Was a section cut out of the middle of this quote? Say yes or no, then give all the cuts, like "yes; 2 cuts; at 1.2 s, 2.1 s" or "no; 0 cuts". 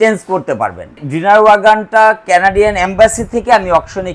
yes; 1 cut; at 1.0 s